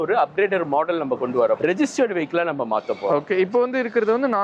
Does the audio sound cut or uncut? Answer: cut